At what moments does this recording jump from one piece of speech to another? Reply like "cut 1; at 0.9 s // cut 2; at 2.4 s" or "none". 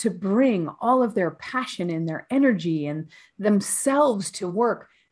none